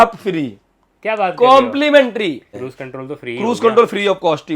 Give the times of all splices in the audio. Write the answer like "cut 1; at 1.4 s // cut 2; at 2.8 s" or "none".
cut 1; at 2.5 s